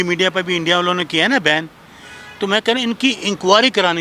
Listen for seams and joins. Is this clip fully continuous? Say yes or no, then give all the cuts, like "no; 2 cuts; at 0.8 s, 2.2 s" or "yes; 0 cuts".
yes; 0 cuts